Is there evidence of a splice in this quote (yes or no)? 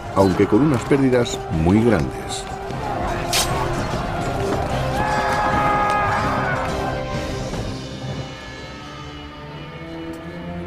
yes